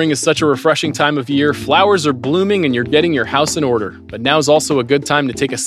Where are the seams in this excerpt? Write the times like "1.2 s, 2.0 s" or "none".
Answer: none